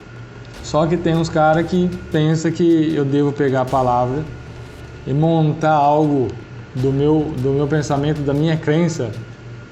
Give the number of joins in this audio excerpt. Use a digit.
0